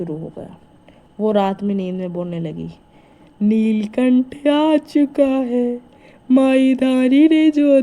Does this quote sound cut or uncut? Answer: uncut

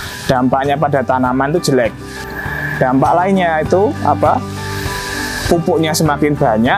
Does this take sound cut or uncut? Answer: cut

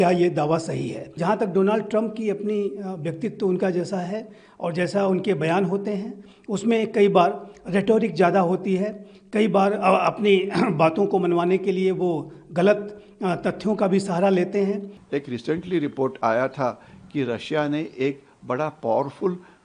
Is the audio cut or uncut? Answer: cut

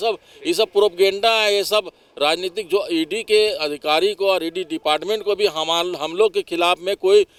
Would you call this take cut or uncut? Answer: uncut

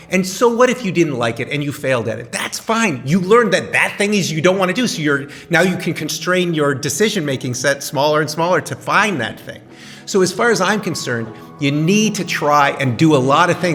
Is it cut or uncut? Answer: uncut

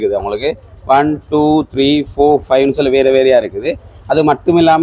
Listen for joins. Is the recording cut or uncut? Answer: uncut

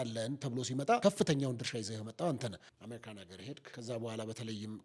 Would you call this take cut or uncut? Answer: cut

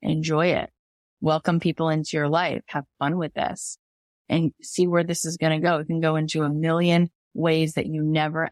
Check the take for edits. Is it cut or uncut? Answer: uncut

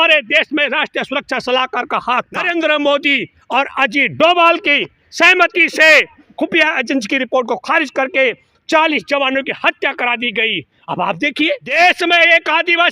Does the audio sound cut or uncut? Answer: cut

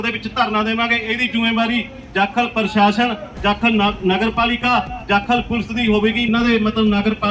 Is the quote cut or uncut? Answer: cut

